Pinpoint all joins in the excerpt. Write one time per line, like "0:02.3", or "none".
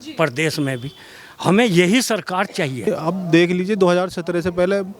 0:02.9